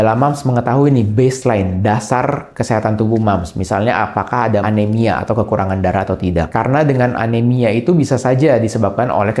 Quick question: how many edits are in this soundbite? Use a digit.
2